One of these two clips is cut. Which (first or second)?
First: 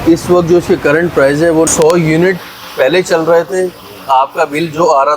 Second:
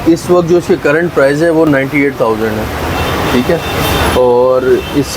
first